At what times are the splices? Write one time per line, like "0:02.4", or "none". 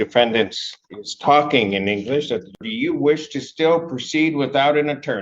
0:02.6